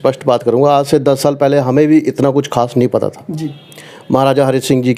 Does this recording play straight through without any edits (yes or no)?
yes